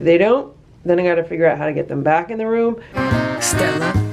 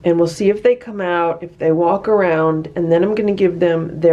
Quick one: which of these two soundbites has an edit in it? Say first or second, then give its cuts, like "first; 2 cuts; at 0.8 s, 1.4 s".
first; 1 cut; at 2.9 s